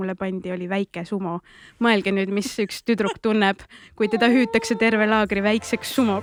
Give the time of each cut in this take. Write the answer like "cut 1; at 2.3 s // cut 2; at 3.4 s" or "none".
none

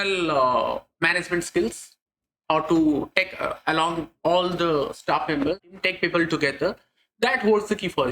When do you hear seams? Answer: cut 1; at 5.7 s

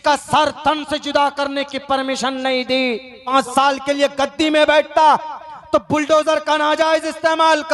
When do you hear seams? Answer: cut 1; at 3.2 s

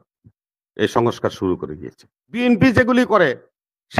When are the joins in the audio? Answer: cut 1; at 2.4 s

